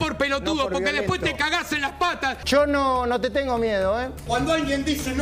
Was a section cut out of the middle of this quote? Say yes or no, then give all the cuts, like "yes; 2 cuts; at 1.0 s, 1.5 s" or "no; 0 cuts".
yes; 2 cuts; at 2.4 s, 4.2 s